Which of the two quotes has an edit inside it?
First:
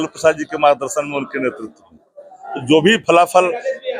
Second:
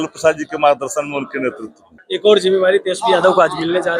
second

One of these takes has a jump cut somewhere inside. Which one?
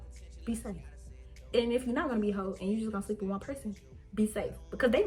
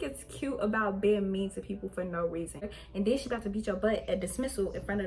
second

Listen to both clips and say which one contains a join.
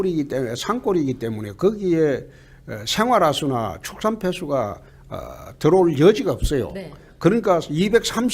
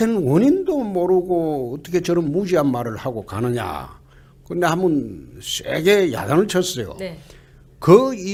first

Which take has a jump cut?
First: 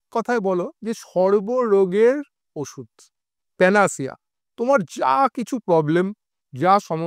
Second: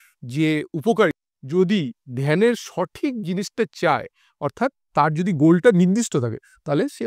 second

